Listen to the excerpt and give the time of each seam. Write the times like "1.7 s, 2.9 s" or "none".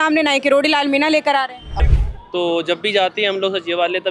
1.8 s